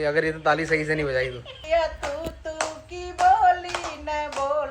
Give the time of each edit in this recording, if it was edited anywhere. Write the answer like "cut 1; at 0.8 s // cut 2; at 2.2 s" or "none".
cut 1; at 1.5 s